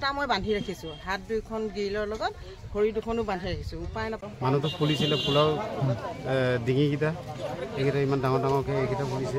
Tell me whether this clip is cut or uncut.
cut